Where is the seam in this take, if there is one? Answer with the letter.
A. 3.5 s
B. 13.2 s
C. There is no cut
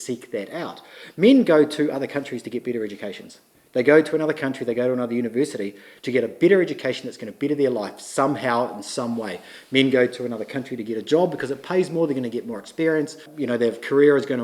B